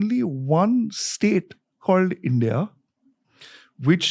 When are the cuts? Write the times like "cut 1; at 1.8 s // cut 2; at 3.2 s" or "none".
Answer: none